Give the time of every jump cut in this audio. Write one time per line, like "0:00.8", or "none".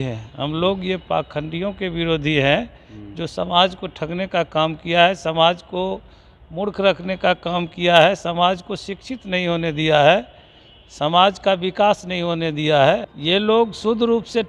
0:13.1